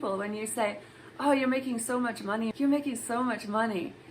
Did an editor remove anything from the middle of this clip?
yes; 1 cut; at 2.5 s

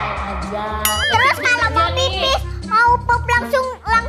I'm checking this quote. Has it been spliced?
yes; 1 cut; at 1.0 s

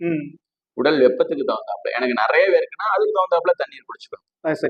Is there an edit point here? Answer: no; 0 cuts

